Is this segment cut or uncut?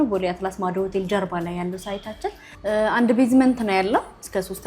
cut